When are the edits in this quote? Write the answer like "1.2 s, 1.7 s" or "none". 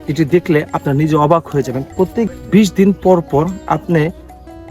2.3 s